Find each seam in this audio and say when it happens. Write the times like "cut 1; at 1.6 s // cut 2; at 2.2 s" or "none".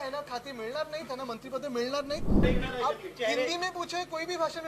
cut 1; at 2.4 s